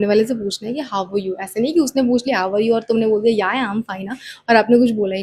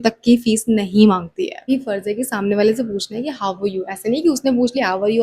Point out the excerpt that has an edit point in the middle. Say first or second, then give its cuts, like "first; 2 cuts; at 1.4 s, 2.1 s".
second; 1 cut; at 1.6 s